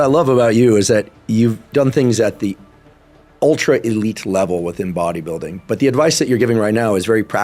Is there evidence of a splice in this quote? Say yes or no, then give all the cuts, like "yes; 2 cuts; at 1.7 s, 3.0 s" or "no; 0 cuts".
no; 0 cuts